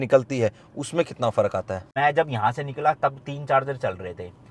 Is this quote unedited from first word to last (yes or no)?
no